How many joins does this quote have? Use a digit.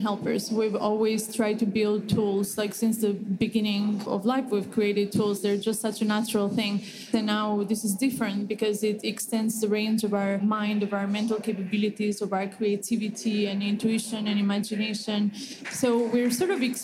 4